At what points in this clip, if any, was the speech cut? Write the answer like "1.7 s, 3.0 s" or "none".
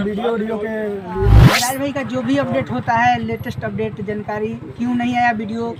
1.5 s